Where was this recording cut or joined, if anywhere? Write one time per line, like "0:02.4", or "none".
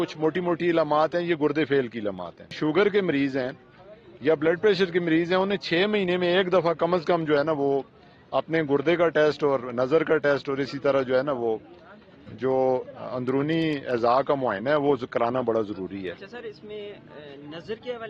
0:02.6